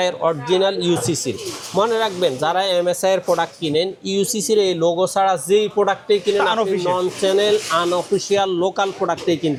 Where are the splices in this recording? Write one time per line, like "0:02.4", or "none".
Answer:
none

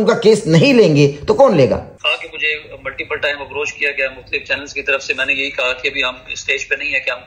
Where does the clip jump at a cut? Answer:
0:01.9

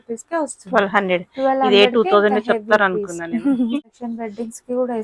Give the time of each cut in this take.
0:03.8

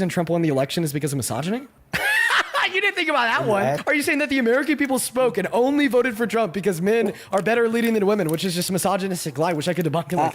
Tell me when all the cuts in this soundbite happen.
0:01.8
0:03.8

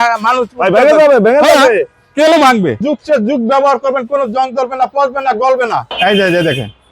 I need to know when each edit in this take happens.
0:02.8
0:05.9

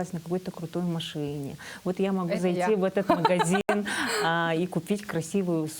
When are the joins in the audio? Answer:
none

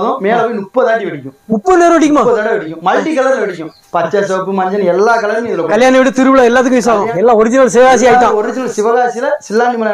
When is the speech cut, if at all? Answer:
0:07.1

